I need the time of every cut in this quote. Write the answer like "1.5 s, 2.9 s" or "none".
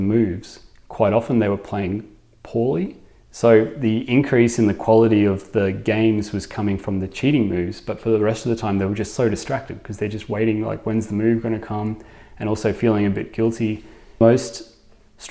14.2 s